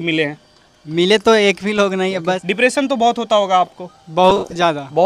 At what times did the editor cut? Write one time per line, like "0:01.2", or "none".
0:02.5